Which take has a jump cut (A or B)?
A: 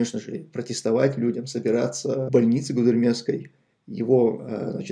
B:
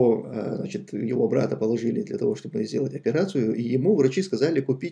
A